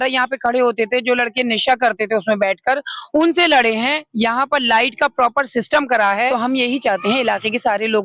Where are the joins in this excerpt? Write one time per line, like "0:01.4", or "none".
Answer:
0:06.3